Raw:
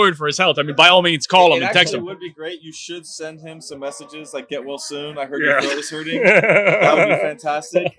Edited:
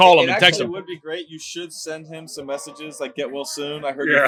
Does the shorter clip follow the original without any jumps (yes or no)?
yes